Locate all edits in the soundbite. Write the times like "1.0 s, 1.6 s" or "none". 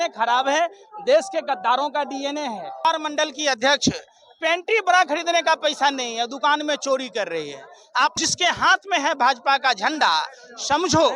2.9 s, 8.1 s